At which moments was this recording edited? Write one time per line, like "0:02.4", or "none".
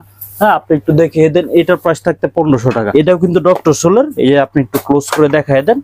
0:02.9